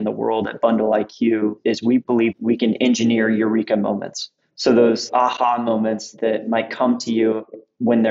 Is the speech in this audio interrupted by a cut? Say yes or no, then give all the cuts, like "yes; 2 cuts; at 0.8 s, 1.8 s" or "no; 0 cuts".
yes; 1 cut; at 5.0 s